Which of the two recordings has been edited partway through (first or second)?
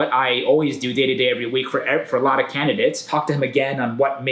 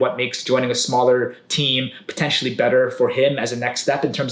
first